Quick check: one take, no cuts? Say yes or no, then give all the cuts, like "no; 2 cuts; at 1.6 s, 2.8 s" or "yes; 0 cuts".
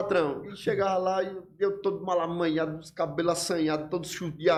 yes; 0 cuts